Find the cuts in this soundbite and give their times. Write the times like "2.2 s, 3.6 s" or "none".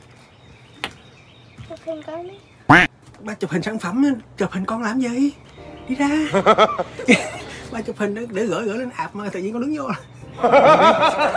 none